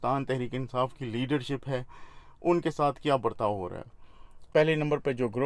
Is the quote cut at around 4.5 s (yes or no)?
yes